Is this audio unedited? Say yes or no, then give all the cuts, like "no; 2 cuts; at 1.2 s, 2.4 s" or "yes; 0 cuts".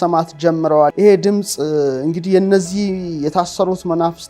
no; 1 cut; at 0.9 s